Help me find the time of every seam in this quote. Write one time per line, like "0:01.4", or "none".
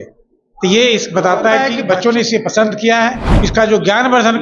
0:01.7
0:03.3